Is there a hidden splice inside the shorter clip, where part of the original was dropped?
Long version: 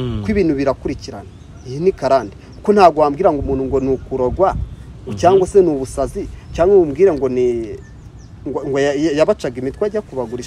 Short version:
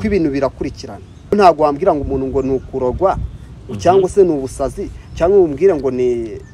yes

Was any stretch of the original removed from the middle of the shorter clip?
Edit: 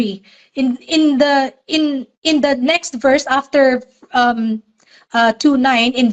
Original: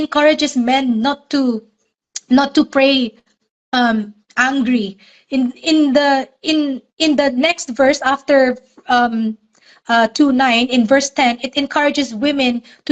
no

